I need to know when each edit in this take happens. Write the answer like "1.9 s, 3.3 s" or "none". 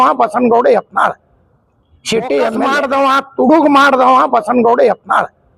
2.7 s